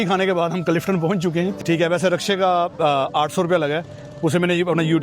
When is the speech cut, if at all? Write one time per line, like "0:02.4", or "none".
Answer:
0:01.5